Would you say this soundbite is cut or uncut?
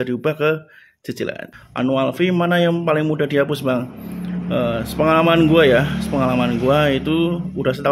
cut